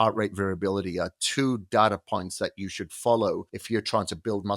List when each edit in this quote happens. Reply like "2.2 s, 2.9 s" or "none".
3.5 s